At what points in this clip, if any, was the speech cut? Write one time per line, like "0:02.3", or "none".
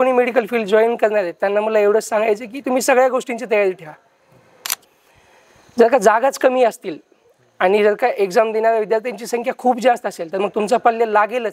0:04.8